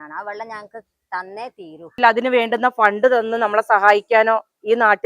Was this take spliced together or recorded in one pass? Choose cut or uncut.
cut